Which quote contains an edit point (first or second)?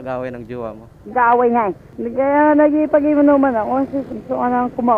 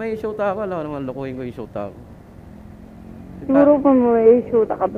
first